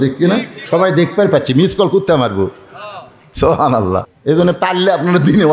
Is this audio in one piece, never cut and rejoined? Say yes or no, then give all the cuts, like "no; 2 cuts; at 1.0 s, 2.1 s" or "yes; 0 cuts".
no; 1 cut; at 4.1 s